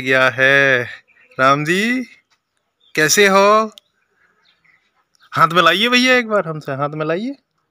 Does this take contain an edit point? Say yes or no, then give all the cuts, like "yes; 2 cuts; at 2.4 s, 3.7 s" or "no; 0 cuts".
no; 0 cuts